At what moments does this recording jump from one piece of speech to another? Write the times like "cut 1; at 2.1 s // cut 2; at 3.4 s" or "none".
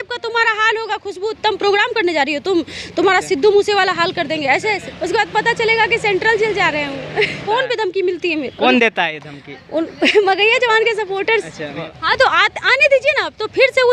cut 1; at 4.9 s // cut 2; at 7.4 s // cut 3; at 11.9 s